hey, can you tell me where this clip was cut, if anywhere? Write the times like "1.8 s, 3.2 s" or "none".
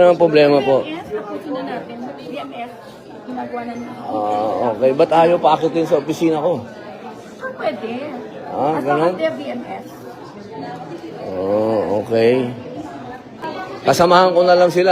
13.4 s